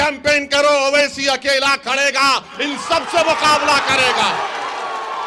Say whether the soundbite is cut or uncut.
uncut